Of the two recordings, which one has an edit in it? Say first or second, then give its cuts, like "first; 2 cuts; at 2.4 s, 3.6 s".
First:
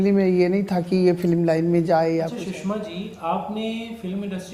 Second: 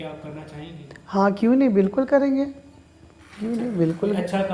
first; 1 cut; at 2.4 s